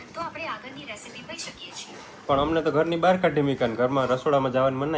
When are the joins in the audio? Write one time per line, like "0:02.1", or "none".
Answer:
none